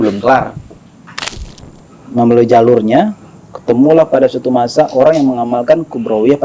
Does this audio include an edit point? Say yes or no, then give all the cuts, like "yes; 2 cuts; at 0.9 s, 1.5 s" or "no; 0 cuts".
yes; 1 cut; at 1.5 s